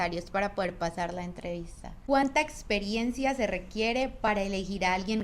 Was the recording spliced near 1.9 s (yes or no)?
yes